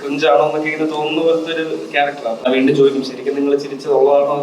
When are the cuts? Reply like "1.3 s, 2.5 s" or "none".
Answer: 2.4 s